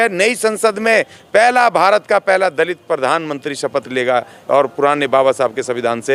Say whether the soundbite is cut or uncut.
uncut